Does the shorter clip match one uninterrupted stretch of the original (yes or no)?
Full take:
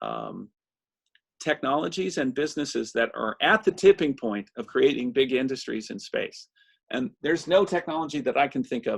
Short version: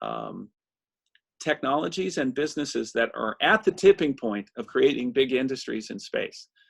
yes